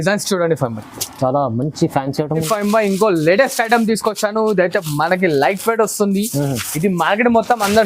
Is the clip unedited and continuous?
no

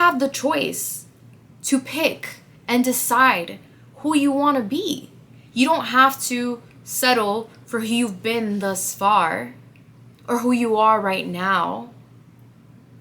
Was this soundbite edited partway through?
no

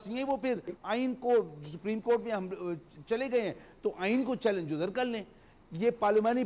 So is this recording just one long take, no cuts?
yes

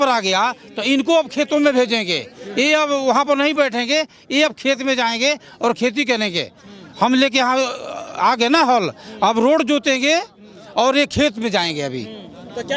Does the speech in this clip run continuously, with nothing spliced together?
yes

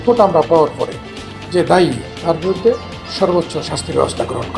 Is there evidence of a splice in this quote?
no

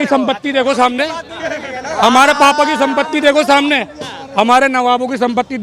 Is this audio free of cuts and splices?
yes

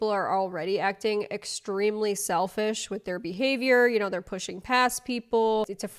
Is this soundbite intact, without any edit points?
yes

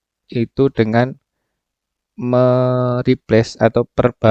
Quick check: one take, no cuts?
yes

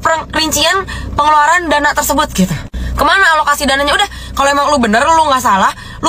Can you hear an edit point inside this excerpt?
no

